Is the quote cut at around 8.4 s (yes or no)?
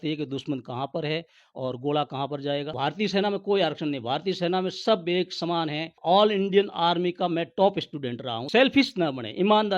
yes